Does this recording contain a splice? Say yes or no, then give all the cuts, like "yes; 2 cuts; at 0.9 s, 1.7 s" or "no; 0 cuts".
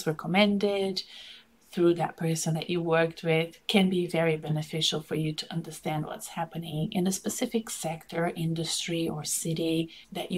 no; 0 cuts